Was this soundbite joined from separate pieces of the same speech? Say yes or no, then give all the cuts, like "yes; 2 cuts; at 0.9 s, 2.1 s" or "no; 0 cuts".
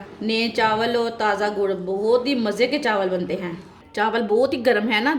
yes; 1 cut; at 3.8 s